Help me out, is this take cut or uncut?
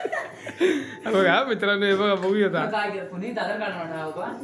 uncut